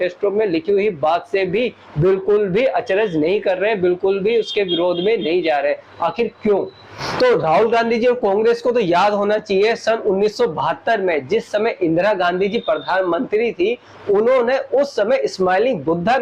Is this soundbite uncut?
yes; 0 cuts

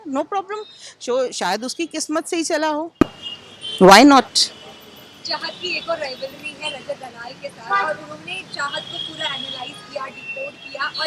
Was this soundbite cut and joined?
no; 0 cuts

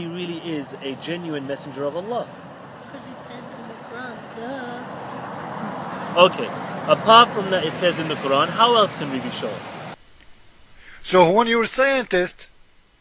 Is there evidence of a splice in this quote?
yes; 1 cut; at 10.1 s

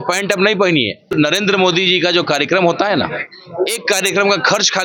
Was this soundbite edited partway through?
yes; 1 cut; at 1.1 s

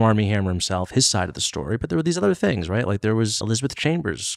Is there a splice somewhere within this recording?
yes; 1 cut; at 3.4 s

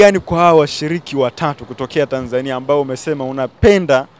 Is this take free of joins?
yes; 0 cuts

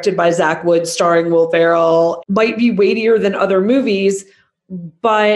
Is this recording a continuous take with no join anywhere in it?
no; 1 cut; at 2.2 s

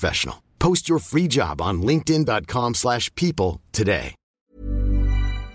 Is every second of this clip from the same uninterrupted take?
no; 1 cut; at 4.4 s

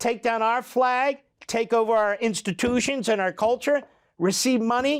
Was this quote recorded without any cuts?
yes; 0 cuts

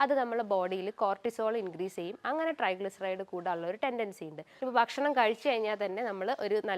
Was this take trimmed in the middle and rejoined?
yes; 1 cut; at 4.5 s

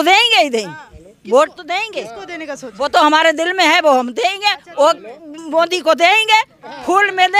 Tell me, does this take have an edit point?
no; 0 cuts

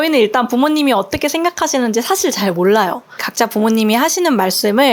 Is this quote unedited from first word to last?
no; 1 cut; at 3.3 s

